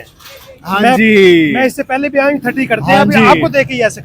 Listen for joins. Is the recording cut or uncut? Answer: uncut